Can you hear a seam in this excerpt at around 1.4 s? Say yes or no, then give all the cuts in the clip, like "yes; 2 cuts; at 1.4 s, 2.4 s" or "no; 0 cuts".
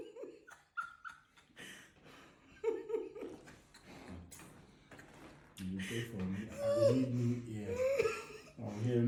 no; 0 cuts